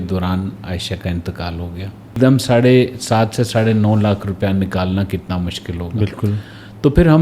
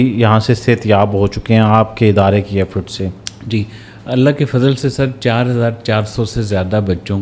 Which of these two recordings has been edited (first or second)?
first